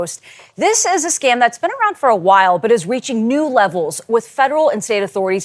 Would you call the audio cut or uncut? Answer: uncut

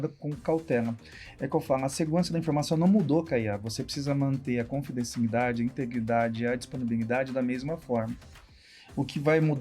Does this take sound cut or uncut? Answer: uncut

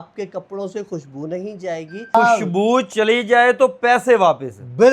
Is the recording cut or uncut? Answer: cut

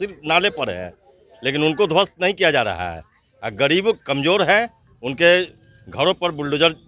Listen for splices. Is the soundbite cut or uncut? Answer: uncut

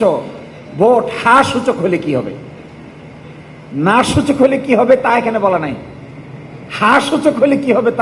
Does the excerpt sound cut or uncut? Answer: uncut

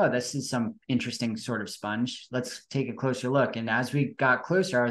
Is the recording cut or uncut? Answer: uncut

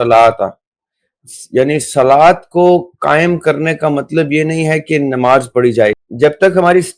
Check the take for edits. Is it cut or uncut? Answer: cut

